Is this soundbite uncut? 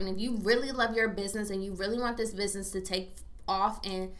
yes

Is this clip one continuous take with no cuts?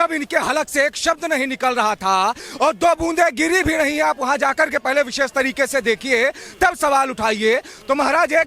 yes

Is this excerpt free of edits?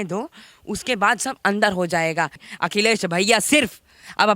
no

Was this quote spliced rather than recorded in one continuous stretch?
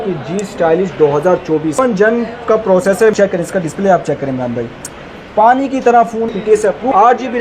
yes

